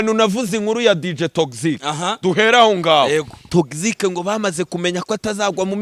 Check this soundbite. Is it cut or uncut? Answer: cut